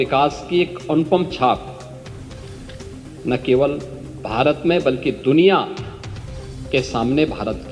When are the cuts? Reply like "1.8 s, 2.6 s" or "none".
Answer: none